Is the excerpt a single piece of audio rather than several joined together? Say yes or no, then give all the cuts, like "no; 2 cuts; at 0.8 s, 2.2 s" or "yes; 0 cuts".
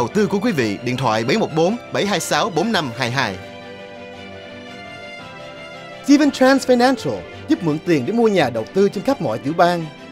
yes; 0 cuts